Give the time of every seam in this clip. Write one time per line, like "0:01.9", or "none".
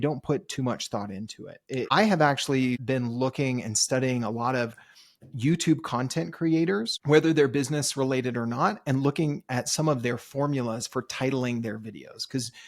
0:01.9
0:02.8
0:06.9